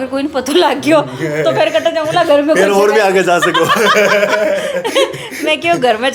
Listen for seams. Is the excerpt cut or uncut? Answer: uncut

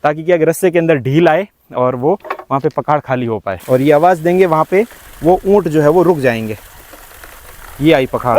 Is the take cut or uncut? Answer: cut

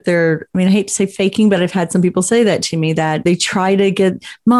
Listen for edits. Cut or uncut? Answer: cut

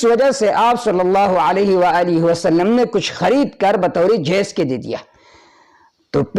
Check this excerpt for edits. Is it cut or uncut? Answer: uncut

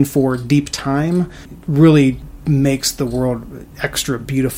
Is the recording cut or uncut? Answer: cut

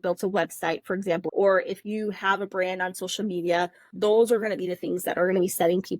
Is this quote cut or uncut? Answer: cut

